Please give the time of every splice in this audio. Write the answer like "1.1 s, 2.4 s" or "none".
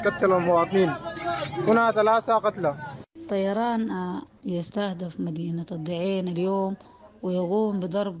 3.1 s, 4.3 s